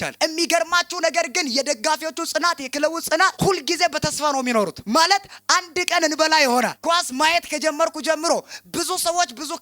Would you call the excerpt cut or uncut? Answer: uncut